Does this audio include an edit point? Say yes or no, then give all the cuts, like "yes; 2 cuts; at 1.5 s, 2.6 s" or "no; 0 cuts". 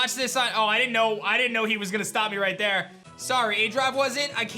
yes; 1 cut; at 3.0 s